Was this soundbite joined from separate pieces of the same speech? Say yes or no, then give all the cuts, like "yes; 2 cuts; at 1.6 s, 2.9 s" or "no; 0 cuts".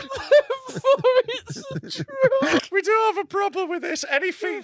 yes; 1 cut; at 2.6 s